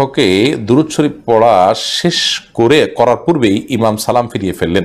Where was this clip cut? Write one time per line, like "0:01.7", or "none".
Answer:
none